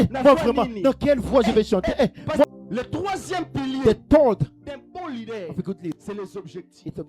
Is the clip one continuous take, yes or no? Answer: no